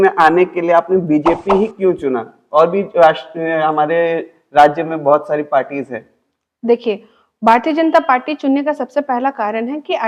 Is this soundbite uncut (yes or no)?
yes